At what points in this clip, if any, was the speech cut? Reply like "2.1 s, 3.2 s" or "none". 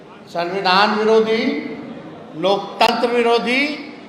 none